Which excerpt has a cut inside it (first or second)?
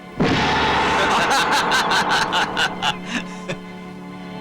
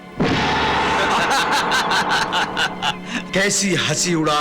second